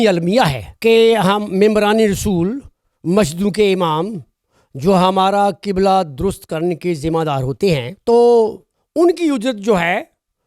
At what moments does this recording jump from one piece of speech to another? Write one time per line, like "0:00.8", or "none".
0:07.9